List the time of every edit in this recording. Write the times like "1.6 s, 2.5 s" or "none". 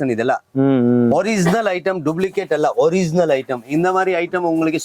none